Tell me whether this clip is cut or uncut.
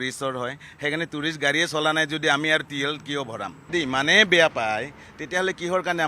cut